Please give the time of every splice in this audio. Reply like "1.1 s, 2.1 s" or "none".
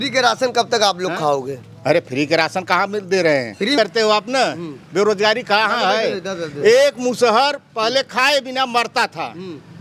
3.8 s

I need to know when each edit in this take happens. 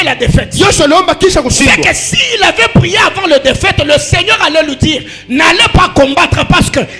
none

